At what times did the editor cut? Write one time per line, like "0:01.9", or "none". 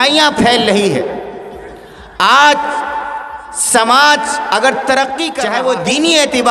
0:05.3